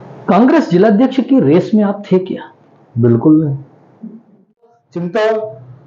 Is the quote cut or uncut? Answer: cut